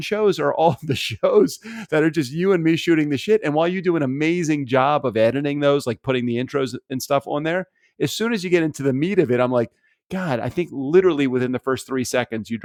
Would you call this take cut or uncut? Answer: uncut